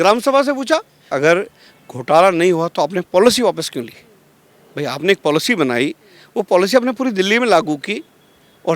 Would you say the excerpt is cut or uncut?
cut